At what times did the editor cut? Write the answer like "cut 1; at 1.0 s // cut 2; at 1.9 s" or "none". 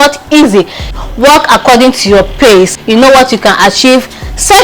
cut 1; at 0.8 s // cut 2; at 2.8 s